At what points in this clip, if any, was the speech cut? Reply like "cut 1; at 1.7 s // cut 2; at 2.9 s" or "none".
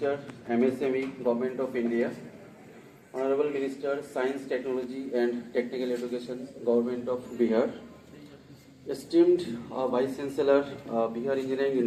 none